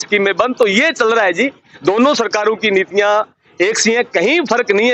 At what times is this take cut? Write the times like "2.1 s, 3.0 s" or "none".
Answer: none